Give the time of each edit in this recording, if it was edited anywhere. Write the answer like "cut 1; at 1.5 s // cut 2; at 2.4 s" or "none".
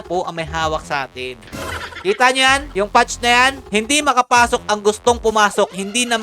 cut 1; at 1.4 s // cut 2; at 2.7 s // cut 3; at 3.6 s